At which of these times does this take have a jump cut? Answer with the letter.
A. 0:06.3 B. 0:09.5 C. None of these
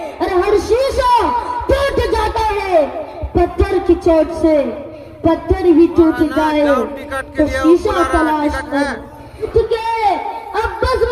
B